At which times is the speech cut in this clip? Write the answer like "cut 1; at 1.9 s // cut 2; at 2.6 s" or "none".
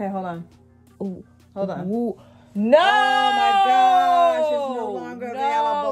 none